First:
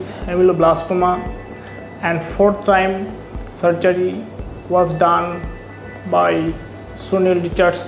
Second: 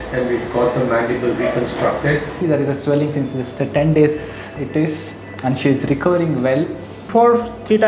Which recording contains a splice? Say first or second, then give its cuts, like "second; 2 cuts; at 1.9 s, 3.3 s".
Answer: second; 2 cuts; at 2.4 s, 7.1 s